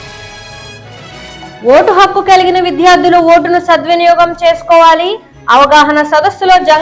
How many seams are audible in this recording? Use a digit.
1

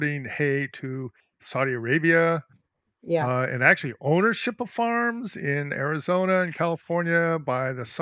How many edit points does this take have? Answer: 0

